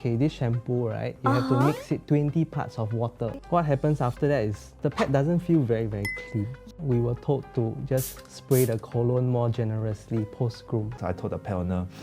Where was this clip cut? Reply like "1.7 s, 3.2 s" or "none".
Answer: 3.4 s, 10.9 s